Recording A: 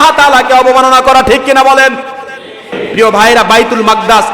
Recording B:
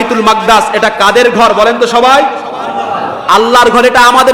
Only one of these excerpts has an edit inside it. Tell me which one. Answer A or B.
A